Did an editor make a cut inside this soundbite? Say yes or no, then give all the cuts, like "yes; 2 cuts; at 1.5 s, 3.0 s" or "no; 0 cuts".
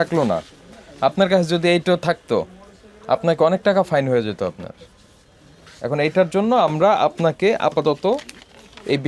no; 0 cuts